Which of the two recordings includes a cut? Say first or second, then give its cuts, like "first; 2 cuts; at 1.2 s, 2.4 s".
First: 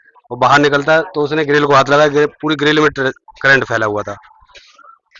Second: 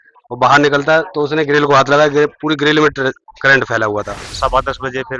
second; 1 cut; at 4.2 s